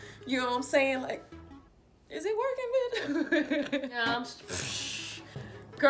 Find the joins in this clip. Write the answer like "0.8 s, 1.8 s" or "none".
4.0 s